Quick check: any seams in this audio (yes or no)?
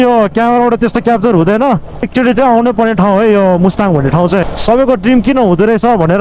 yes